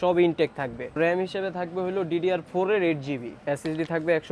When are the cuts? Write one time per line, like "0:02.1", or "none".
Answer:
0:01.0
0:03.3